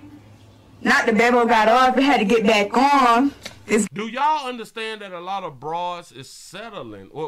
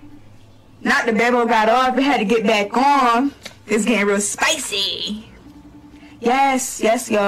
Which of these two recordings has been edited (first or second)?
second